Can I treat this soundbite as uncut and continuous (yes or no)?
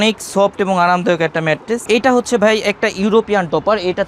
no